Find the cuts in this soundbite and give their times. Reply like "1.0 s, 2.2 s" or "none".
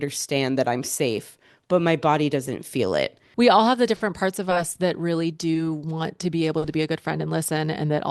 3.2 s

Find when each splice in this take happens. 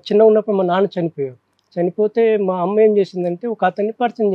none

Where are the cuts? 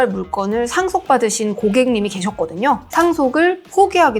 2.8 s

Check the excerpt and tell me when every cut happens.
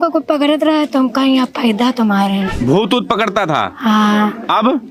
none

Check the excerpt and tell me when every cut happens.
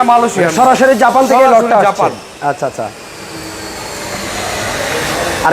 none

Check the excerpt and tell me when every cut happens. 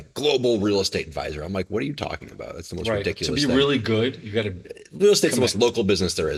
none

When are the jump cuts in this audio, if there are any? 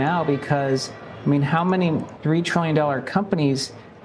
2.1 s

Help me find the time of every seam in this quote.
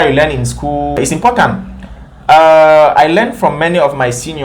1.0 s

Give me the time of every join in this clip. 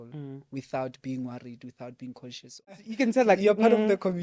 2.9 s

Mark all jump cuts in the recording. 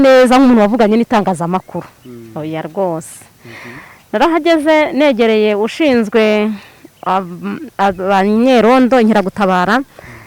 none

